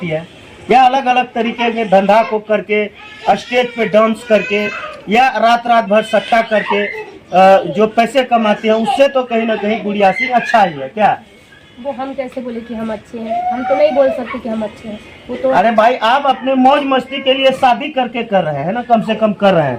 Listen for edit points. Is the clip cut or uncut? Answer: uncut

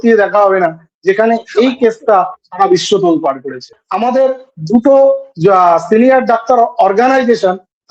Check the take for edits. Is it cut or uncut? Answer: cut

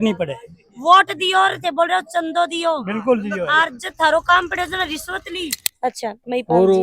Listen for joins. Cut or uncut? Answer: cut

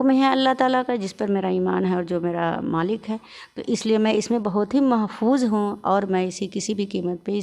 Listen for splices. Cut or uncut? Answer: uncut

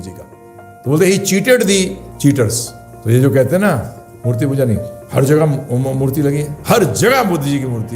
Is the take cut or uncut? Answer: cut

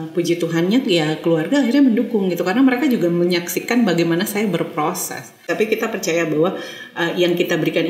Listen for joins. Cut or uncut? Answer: cut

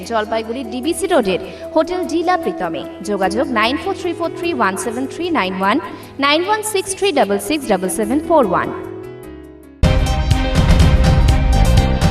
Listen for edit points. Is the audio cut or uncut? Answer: cut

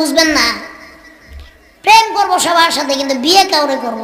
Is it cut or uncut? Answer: uncut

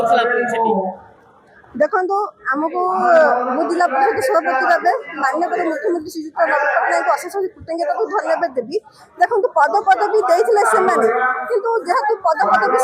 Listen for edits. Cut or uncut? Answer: uncut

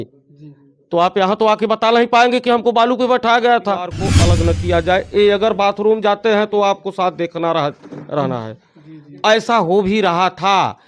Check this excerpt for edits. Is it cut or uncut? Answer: cut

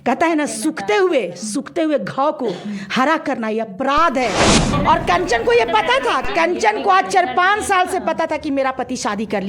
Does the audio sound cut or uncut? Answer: cut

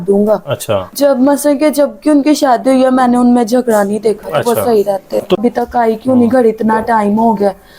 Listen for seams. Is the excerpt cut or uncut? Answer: cut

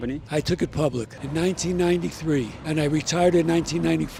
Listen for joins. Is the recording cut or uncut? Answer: uncut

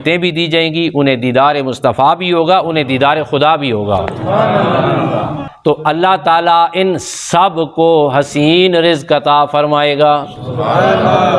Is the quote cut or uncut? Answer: cut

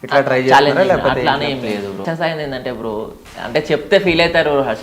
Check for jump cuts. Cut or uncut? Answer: cut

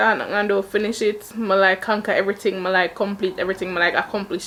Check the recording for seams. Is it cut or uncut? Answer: uncut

